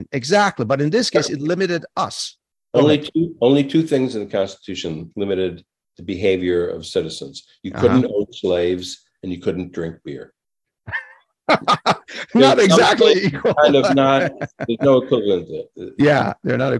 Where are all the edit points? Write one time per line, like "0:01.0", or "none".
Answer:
none